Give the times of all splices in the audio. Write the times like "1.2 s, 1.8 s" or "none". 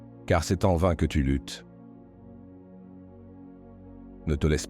1.4 s, 3.7 s